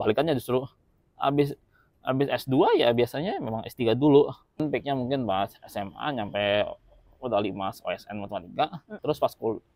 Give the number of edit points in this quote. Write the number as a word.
two